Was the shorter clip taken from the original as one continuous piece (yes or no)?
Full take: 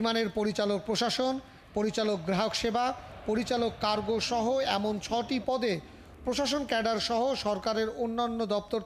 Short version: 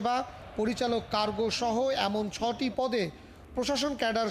yes